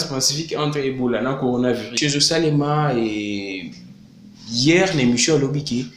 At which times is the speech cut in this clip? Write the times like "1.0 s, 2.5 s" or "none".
1.9 s